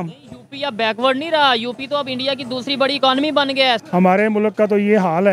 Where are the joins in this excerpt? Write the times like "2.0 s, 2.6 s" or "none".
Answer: 3.8 s